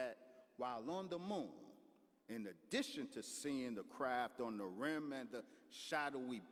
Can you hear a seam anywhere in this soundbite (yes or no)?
no